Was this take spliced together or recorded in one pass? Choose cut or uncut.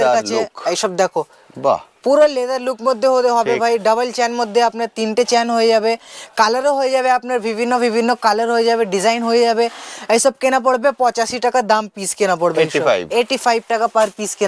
uncut